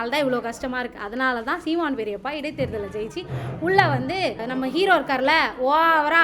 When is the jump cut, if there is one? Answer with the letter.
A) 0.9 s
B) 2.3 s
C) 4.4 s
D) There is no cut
C